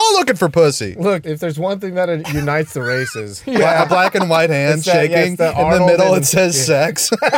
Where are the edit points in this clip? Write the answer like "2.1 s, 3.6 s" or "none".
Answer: 1.2 s, 3.4 s